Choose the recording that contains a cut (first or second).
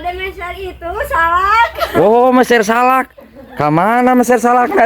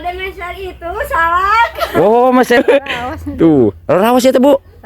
second